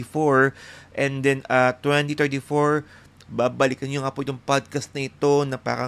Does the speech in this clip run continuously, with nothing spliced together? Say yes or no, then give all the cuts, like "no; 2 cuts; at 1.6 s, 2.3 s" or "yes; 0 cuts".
yes; 0 cuts